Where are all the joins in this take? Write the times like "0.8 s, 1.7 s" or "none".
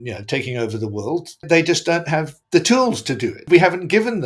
1.5 s, 3.4 s